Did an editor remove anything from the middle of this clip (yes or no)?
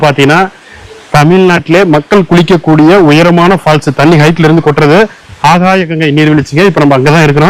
no